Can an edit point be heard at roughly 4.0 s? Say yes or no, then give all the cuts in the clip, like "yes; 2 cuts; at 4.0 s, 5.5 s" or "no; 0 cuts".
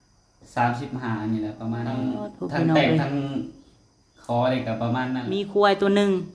no; 2 cuts; at 2.0 s, 5.3 s